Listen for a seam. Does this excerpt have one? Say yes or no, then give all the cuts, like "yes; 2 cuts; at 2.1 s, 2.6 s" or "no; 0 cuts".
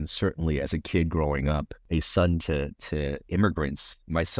yes; 1 cut; at 1.8 s